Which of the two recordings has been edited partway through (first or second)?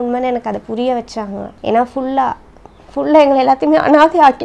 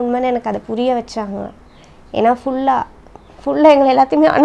first